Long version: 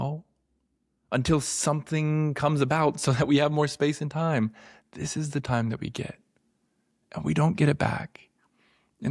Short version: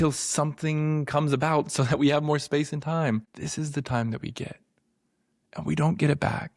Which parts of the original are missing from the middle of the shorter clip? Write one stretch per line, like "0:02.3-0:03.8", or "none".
0:04.7-0:05.0